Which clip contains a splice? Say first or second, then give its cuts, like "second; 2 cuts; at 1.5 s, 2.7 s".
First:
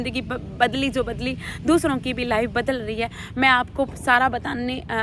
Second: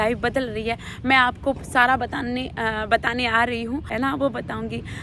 second; 1 cut; at 3.9 s